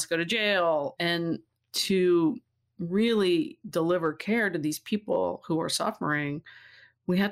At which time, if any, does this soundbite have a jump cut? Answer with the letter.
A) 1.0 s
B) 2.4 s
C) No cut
A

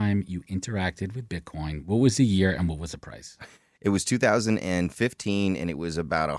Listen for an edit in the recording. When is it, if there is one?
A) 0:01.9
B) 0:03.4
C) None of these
C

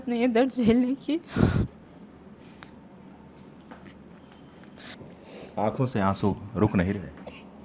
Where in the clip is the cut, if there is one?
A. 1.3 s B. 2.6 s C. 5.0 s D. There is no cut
C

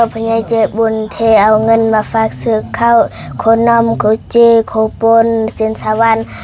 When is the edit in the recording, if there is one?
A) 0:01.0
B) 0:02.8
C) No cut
C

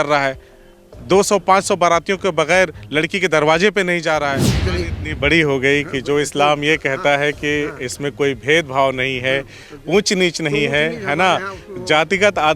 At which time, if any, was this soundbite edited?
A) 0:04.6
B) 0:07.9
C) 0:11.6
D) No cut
A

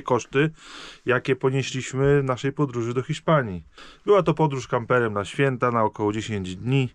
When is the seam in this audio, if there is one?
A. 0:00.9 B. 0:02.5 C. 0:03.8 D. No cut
D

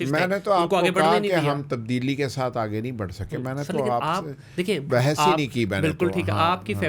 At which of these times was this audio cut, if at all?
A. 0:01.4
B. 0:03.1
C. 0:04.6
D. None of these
D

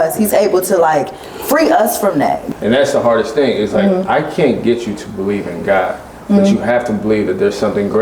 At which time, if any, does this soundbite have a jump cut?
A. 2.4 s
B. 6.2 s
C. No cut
A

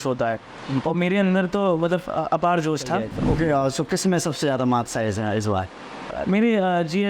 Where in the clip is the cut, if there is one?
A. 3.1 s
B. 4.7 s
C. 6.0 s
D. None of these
A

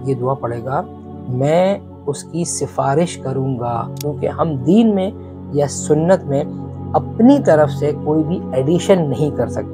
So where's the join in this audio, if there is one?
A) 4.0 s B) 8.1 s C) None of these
A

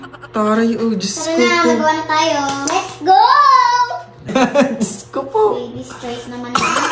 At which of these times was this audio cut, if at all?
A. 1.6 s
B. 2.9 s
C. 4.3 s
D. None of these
C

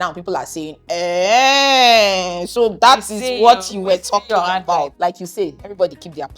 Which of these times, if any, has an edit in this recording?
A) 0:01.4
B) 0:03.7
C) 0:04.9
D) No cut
C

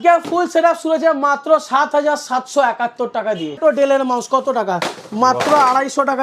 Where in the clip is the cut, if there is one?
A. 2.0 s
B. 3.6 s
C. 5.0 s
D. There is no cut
B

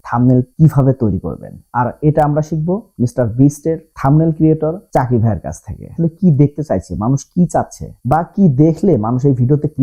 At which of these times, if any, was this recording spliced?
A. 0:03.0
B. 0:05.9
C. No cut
B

